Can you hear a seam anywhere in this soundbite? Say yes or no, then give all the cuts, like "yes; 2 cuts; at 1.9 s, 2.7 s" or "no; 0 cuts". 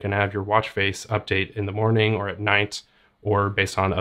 no; 0 cuts